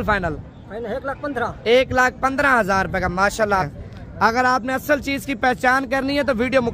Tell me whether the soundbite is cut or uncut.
cut